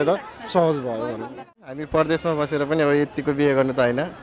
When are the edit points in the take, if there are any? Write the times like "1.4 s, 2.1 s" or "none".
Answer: 1.8 s